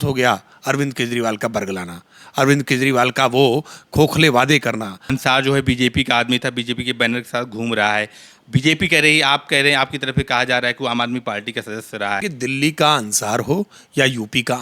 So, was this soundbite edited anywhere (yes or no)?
yes